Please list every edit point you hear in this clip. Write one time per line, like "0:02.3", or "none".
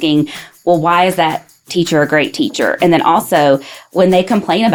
none